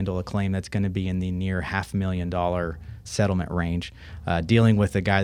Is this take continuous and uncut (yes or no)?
yes